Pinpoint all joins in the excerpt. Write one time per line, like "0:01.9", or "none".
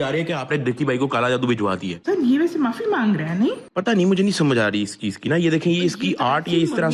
0:01.9